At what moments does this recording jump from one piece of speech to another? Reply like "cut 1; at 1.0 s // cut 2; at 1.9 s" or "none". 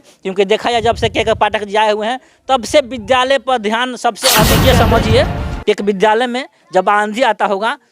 cut 1; at 4.5 s